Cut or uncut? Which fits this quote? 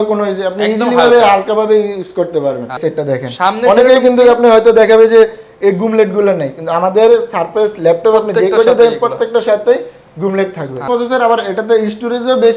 cut